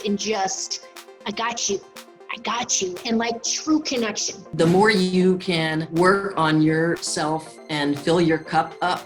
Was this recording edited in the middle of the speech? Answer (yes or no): yes